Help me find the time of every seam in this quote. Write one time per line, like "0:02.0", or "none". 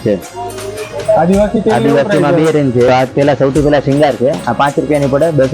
0:02.9